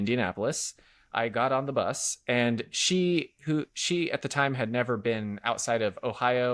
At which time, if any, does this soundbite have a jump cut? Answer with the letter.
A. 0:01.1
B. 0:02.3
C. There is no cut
C